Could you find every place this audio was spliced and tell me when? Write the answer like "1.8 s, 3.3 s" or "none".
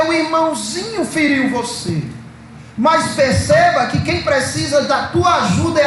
none